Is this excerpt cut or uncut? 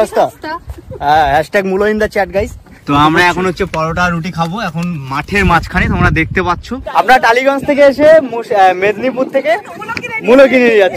cut